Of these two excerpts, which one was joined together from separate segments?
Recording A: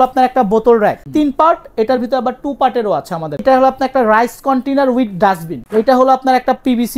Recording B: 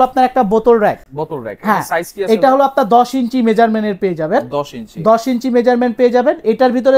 A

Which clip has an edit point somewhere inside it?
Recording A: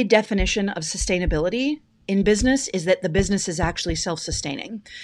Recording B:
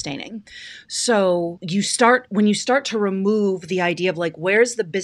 B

